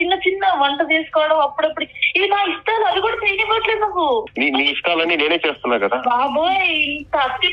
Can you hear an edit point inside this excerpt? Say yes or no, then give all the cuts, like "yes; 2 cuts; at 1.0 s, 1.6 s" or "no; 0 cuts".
yes; 1 cut; at 4.3 s